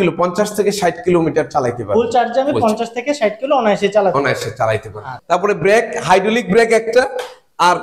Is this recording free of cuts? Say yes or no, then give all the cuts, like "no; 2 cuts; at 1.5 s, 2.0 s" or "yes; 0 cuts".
no; 1 cut; at 5.1 s